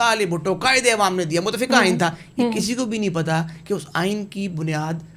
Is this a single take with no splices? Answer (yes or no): yes